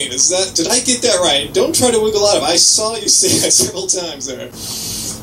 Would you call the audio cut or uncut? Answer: uncut